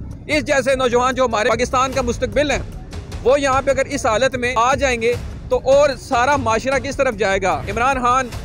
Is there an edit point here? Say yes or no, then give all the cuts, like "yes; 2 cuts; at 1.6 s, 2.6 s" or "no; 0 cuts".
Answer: yes; 3 cuts; at 1.5 s, 4.5 s, 7.7 s